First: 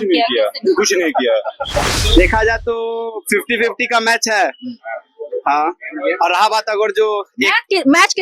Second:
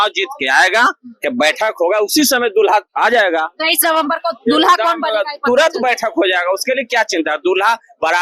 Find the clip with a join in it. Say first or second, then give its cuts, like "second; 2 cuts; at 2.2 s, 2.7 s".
first; 1 cut; at 2.0 s